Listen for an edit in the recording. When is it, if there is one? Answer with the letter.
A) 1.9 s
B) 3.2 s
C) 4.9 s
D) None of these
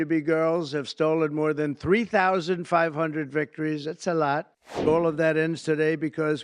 C